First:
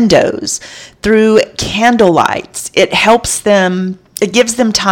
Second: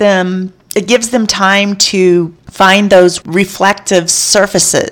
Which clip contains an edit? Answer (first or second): second